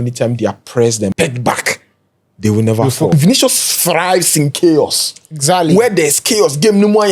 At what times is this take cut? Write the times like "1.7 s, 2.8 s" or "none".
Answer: 1.1 s, 3.1 s